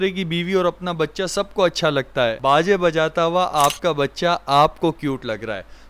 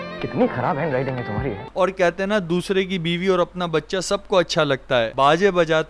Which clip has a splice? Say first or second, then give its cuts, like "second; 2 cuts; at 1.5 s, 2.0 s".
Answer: second; 1 cut; at 1.7 s